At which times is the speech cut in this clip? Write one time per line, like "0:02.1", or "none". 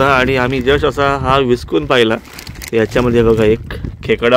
none